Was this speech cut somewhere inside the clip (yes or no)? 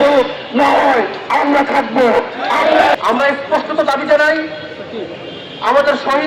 yes